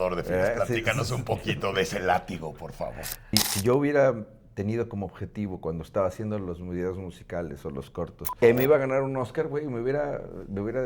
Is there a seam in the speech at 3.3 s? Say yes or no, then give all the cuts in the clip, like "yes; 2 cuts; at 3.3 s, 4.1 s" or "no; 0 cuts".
yes; 2 cuts; at 3.3 s, 8.3 s